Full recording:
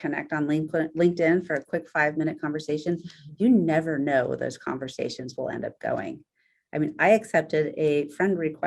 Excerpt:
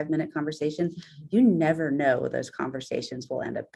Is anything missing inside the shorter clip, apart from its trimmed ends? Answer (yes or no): no